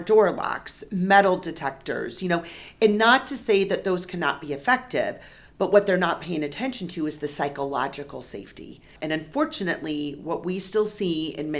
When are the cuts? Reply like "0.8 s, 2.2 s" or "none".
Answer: 8.9 s